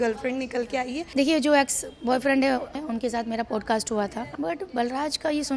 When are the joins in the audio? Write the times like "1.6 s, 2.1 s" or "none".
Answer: 1.1 s, 2.8 s, 4.2 s

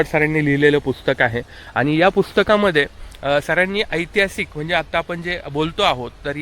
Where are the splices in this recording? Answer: none

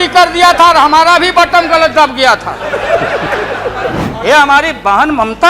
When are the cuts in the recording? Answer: 4.0 s

